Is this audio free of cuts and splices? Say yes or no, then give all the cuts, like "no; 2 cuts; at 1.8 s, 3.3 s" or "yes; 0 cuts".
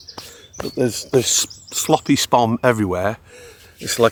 yes; 0 cuts